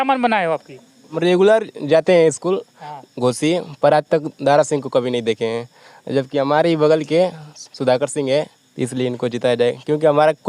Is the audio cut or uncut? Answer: cut